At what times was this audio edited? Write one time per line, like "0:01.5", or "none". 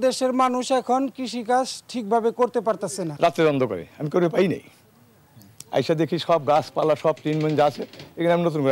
0:03.1